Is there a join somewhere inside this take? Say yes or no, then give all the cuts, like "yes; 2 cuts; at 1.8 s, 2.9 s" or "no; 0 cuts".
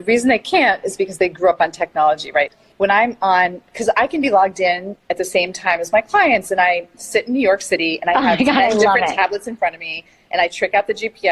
yes; 1 cut; at 2.5 s